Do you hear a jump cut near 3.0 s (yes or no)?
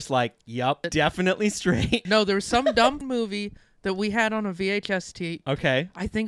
yes